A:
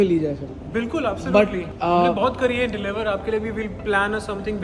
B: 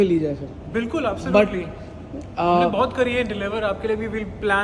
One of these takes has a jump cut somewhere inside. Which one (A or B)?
A